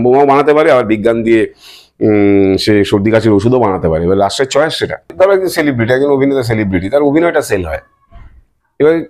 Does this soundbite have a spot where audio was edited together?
yes; 1 cut; at 5.1 s

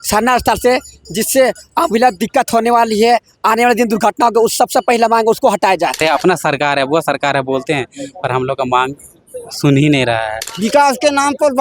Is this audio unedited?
no; 2 cuts; at 6.0 s, 10.4 s

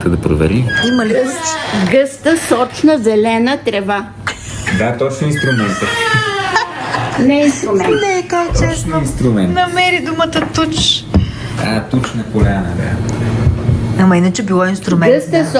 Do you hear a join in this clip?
no; 0 cuts

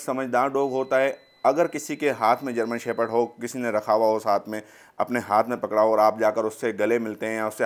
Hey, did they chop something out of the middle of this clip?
no; 0 cuts

